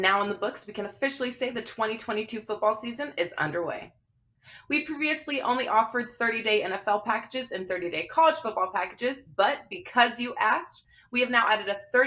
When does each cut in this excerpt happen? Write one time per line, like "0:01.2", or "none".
0:02.7